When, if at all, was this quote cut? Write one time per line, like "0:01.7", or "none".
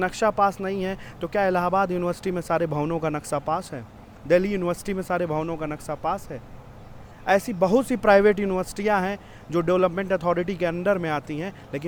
none